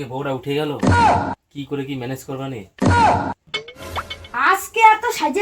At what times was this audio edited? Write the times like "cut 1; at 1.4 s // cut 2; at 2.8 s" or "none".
cut 1; at 4.2 s